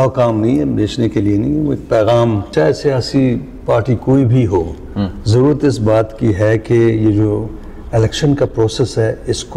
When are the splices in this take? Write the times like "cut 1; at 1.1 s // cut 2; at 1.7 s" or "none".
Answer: cut 1; at 2.5 s